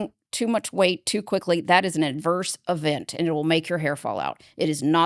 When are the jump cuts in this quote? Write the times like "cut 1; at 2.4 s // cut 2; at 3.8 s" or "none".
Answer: none